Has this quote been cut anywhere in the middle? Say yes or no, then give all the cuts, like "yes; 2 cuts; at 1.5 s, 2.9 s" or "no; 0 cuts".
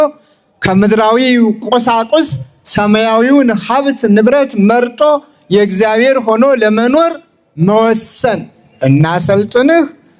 yes; 1 cut; at 8.3 s